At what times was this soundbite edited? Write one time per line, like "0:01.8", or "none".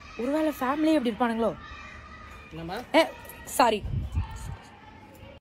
none